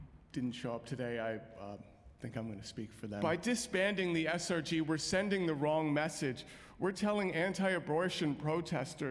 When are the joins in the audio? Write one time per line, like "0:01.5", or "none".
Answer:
0:03.2